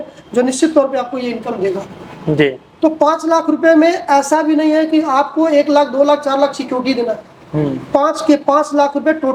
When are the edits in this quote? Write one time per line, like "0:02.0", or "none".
none